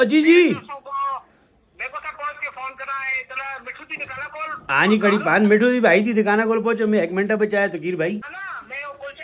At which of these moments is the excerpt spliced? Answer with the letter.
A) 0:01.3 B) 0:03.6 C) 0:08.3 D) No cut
C